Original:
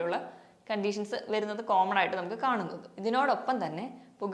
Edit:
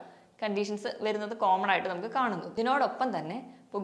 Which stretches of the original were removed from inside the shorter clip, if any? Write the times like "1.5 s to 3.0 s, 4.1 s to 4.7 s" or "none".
2.7 s to 2.9 s